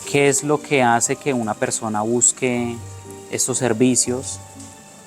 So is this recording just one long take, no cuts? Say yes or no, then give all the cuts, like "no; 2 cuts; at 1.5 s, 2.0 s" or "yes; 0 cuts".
yes; 0 cuts